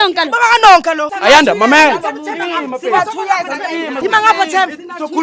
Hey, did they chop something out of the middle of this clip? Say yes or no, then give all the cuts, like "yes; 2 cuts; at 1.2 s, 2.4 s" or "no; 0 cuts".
yes; 1 cut; at 1.1 s